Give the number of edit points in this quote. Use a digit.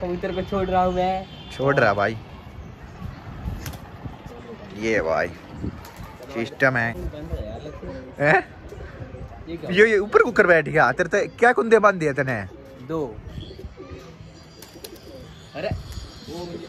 1